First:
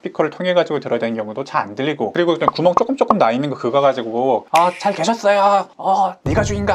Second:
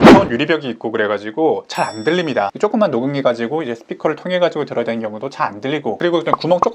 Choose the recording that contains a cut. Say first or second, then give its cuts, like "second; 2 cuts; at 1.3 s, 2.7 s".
second; 1 cut; at 2.5 s